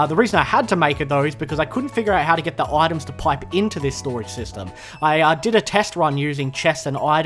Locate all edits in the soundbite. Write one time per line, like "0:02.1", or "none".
0:03.9